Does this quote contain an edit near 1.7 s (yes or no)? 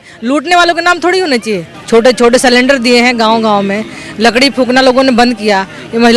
yes